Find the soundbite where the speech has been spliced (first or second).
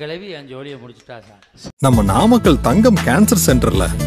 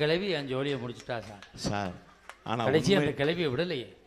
first